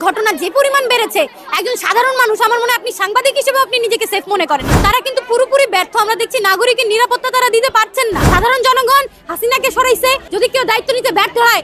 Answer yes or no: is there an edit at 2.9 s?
no